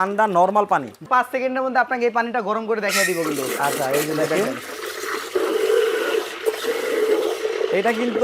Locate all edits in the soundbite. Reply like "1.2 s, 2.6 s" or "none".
1.1 s